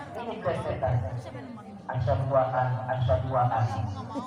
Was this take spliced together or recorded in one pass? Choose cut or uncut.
uncut